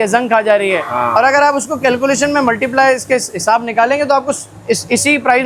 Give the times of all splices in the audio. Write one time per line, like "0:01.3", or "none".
none